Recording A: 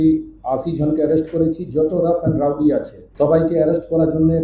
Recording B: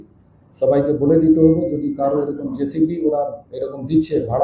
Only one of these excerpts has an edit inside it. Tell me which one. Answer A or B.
A